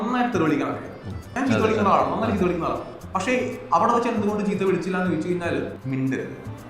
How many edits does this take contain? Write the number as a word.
two